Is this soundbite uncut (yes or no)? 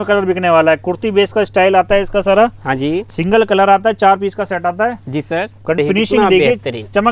no